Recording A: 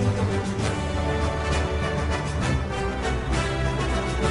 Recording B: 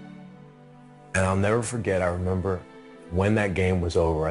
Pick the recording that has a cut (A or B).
B